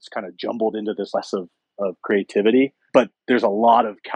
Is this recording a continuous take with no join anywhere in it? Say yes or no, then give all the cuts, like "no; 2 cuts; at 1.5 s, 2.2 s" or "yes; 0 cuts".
no; 1 cut; at 2.8 s